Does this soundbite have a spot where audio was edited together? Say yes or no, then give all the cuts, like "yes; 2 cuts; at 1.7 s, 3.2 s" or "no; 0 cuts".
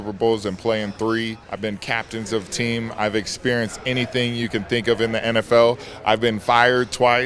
yes; 1 cut; at 1.4 s